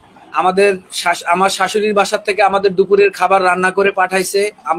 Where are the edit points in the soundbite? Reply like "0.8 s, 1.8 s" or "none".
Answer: none